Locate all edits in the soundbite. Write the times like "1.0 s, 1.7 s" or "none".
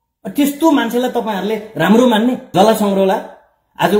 2.4 s